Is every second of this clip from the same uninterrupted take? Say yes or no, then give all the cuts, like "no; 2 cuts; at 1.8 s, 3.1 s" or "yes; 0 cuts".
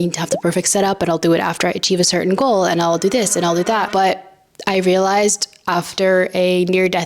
no; 1 cut; at 3.9 s